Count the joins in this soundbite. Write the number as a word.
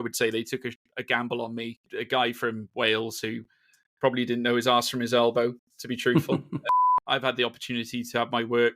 two